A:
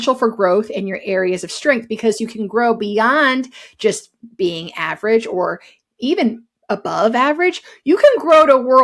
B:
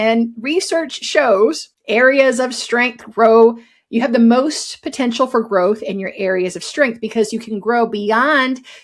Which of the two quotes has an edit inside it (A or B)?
B